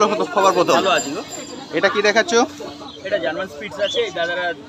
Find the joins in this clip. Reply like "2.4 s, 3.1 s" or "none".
none